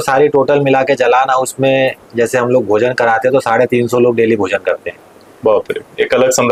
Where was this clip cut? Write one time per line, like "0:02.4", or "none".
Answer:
none